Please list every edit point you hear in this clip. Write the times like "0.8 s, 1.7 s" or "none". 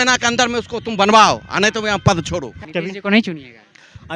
2.6 s